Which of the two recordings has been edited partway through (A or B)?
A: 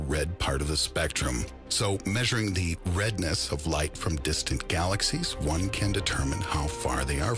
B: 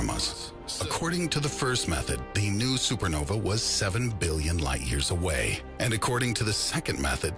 A